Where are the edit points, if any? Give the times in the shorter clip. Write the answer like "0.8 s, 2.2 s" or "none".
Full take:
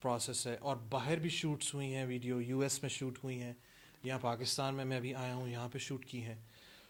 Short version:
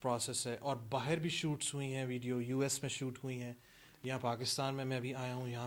none